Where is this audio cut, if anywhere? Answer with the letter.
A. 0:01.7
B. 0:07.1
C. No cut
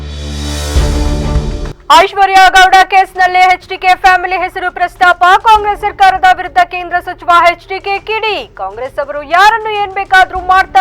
A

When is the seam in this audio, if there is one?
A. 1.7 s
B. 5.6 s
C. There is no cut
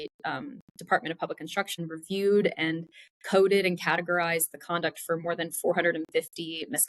A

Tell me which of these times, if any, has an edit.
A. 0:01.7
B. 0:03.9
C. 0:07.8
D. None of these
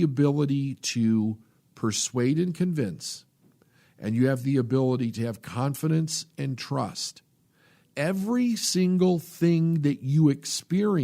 C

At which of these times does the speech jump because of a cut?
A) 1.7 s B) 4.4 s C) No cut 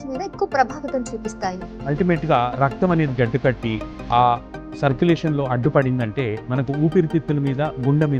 A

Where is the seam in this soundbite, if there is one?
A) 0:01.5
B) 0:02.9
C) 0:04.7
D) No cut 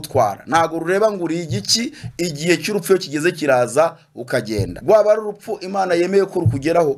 C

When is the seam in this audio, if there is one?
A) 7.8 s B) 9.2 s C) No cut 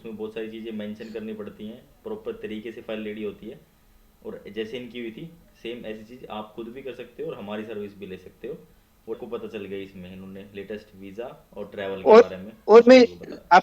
B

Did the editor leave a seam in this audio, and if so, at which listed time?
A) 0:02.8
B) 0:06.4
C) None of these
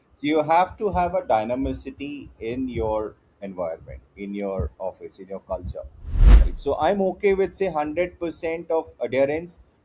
B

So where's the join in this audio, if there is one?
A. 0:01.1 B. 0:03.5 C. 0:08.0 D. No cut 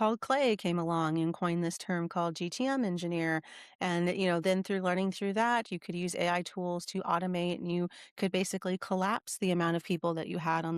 D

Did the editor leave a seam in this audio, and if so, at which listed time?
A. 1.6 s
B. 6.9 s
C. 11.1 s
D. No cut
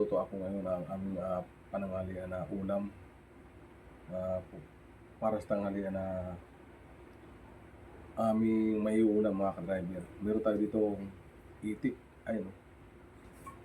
D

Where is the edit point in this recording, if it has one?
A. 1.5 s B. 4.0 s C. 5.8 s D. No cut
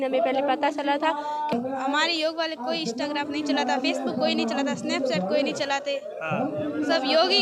A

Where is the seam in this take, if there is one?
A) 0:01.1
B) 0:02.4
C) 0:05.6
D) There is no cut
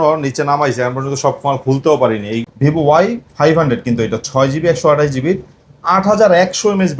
B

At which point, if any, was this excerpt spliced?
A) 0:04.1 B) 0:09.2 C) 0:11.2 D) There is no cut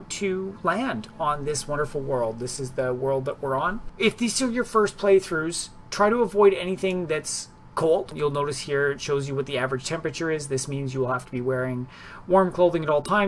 A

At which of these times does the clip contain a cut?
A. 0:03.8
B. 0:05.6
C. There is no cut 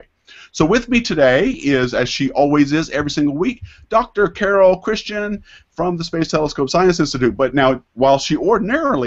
A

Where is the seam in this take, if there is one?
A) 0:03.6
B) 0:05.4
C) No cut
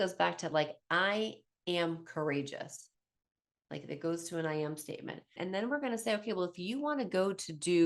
B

